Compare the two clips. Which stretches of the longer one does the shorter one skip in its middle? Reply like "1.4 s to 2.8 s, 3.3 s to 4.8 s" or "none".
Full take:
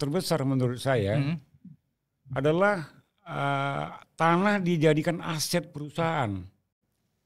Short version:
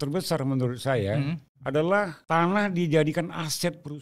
1.5 s to 2.2 s, 2.9 s to 4.1 s